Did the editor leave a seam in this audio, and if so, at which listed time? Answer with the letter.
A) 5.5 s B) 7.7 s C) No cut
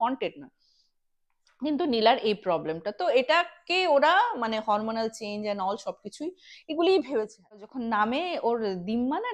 B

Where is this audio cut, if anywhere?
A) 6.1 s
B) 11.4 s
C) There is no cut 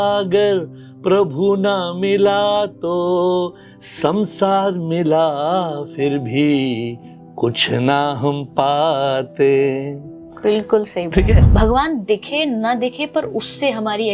B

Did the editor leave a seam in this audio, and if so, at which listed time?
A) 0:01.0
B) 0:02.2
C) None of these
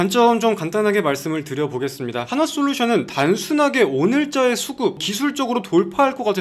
B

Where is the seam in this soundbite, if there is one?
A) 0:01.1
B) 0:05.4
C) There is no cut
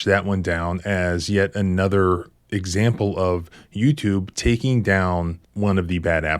B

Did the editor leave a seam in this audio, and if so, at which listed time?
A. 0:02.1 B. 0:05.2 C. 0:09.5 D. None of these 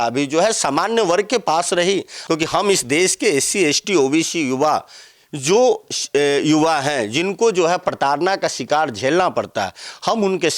A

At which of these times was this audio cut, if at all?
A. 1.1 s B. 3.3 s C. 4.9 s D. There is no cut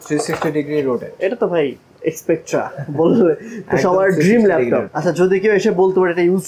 C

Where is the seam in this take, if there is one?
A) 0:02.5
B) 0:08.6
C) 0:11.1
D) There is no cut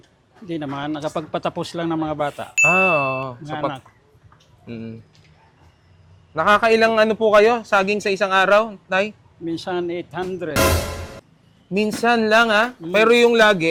D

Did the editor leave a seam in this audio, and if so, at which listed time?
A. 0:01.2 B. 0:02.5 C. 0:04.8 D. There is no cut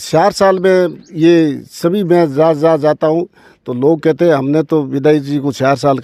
D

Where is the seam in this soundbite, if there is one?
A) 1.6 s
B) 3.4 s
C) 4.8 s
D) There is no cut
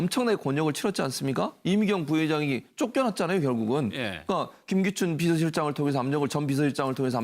C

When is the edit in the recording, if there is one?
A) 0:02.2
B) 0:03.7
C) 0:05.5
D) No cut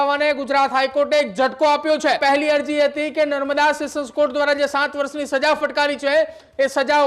A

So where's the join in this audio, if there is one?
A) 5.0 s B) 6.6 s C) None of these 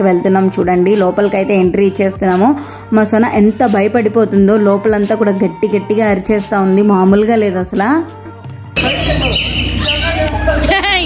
C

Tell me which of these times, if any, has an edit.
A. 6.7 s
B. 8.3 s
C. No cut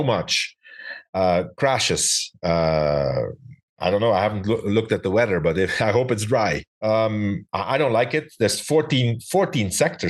A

